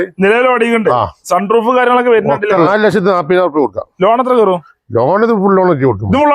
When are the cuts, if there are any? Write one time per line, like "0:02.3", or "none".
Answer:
0:02.7